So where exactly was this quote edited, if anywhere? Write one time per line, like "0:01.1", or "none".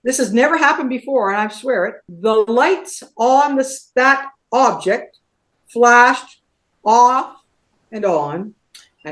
none